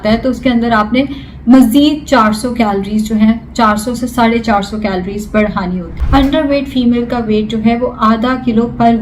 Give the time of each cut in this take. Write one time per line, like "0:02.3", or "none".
0:05.9